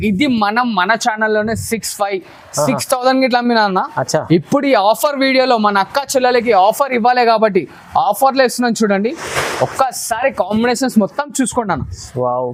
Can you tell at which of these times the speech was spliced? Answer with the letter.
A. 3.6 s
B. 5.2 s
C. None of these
C